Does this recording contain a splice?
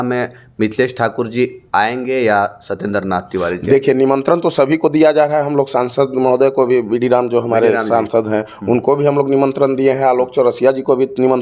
no; 0 cuts

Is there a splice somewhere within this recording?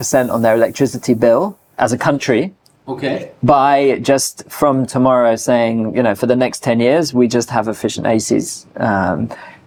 no; 0 cuts

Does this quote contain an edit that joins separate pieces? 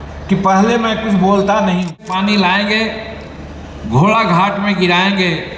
yes; 1 cut; at 2.1 s

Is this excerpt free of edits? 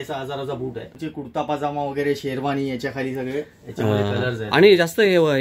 no; 1 cut; at 1.0 s

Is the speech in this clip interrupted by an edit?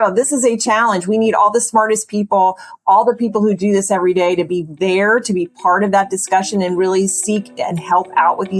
no; 0 cuts

